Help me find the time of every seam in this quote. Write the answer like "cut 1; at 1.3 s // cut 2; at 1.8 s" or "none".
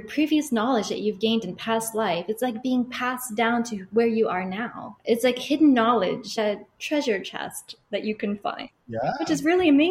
cut 1; at 6.3 s